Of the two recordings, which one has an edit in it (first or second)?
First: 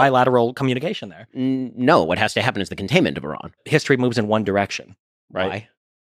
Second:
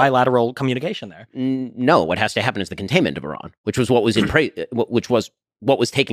first